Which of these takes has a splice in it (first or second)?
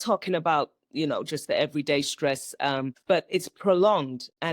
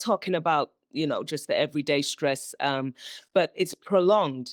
first